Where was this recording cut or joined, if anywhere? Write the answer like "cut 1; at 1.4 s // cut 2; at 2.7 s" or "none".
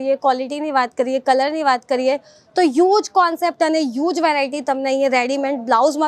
none